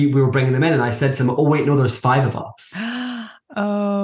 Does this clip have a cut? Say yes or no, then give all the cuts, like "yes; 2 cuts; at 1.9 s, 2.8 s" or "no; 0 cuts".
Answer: no; 0 cuts